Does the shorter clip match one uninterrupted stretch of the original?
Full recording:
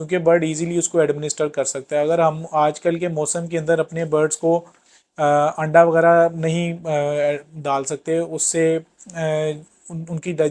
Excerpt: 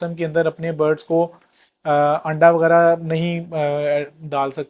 yes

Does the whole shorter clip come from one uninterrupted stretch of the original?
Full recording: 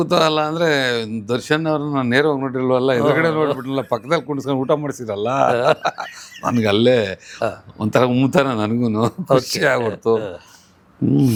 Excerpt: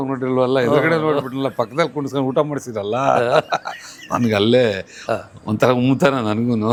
yes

